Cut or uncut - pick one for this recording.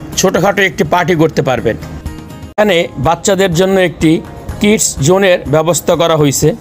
cut